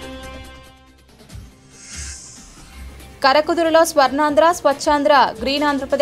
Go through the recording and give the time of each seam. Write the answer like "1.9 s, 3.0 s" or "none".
none

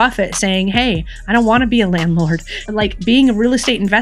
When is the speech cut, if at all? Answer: 2.7 s

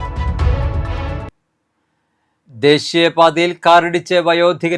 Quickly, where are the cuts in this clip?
none

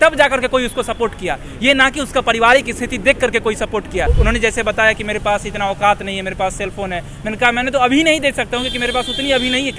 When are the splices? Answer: 4.1 s

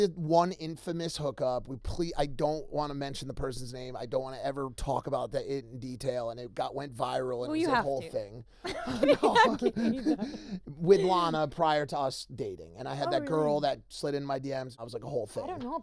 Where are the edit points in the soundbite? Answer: none

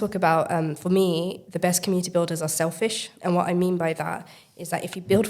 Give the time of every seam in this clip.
1.4 s, 3.1 s

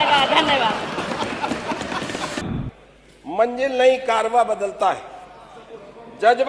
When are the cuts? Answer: 2.4 s

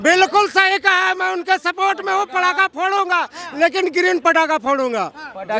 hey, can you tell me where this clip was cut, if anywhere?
none

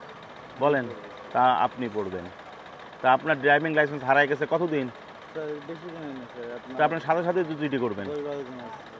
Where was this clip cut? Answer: none

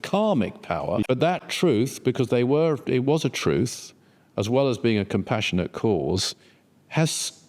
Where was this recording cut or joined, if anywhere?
1.0 s

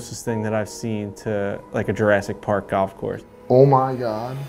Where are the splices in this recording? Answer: 3.2 s

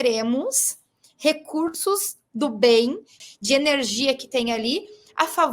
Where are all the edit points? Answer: 3.1 s

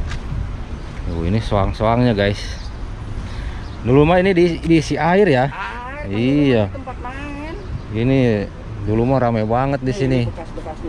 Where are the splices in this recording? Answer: none

